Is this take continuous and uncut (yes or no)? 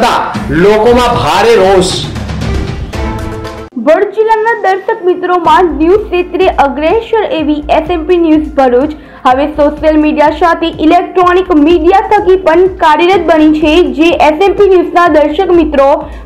no